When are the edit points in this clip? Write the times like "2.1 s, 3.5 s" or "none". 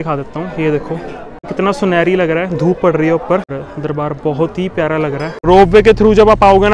1.5 s, 3.6 s, 5.3 s

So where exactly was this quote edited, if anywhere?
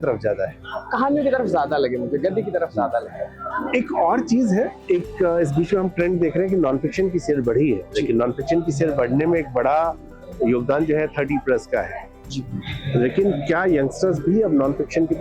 none

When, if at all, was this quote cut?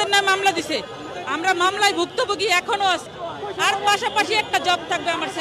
3.2 s

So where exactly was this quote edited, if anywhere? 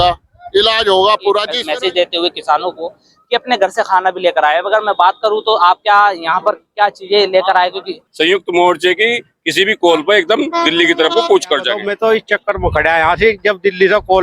1.6 s, 8.0 s, 11.8 s

